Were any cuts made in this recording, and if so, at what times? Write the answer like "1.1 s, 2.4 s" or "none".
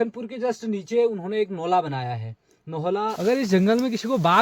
3.2 s